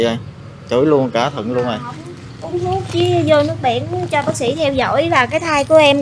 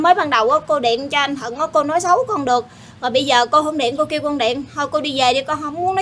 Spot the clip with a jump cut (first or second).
first